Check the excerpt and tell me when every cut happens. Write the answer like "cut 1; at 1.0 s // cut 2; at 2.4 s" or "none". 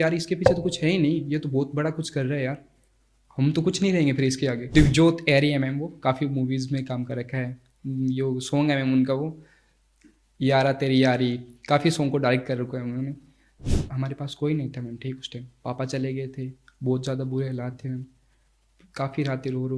cut 1; at 4.7 s // cut 2; at 13.4 s